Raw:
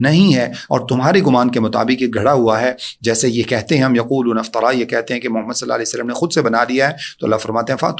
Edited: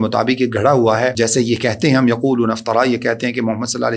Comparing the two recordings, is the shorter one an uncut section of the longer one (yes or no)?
no